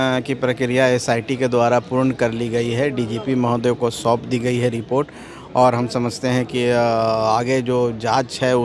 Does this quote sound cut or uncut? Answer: uncut